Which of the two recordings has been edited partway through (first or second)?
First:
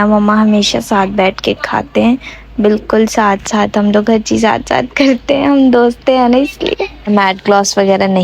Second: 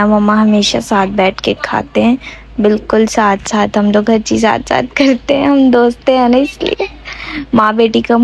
first